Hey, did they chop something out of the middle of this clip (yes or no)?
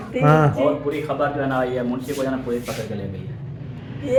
no